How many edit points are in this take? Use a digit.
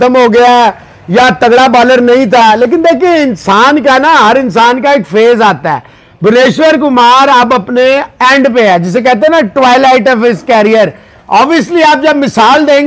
0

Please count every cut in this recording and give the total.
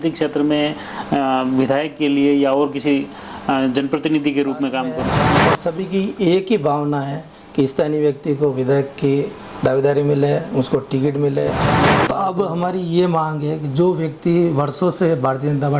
2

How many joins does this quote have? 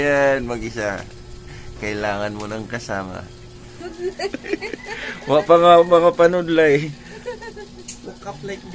1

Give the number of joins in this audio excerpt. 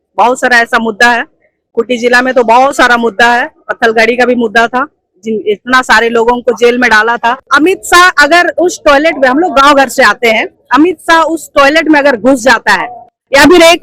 1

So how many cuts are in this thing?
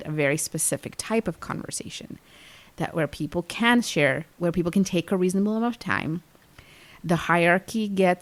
0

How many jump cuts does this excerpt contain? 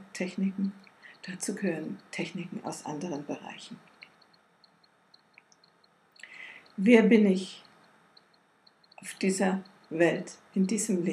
1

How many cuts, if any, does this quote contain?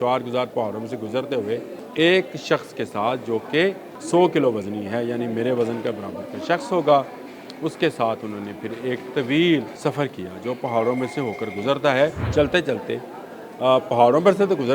4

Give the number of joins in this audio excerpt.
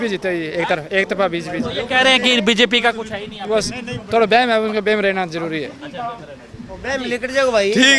0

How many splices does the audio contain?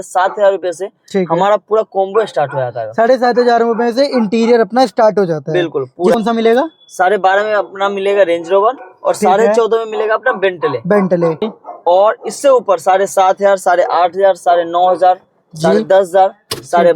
2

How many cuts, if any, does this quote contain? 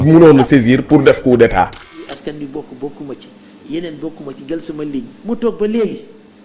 1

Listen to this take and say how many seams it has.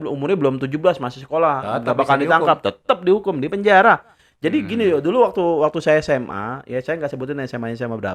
0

